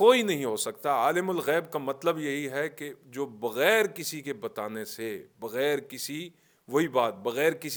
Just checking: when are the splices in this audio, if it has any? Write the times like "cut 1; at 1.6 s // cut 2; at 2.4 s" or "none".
none